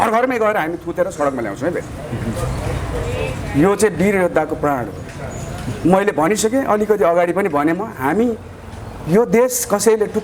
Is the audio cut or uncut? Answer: uncut